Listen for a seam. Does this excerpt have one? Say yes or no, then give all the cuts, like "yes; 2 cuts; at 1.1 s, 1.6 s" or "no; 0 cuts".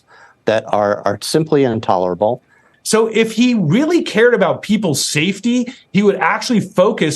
yes; 1 cut; at 2.6 s